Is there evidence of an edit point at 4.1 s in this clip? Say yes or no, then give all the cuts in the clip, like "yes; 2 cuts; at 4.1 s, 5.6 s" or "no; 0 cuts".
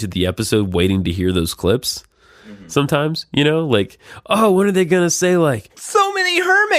no; 1 cut; at 5.8 s